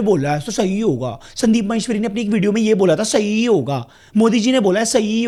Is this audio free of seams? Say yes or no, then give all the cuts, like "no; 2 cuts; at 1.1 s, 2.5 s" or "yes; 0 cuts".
yes; 0 cuts